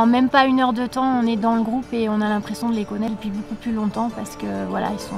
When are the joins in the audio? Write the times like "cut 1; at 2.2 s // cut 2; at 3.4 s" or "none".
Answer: cut 1; at 3.1 s